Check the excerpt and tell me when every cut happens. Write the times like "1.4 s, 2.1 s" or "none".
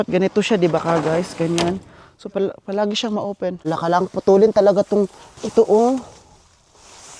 3.6 s